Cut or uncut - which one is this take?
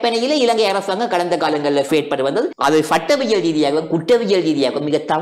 cut